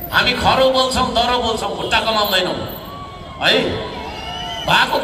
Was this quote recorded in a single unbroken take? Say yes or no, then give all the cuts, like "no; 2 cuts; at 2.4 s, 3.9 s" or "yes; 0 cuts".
yes; 0 cuts